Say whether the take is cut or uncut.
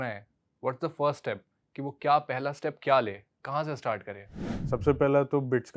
cut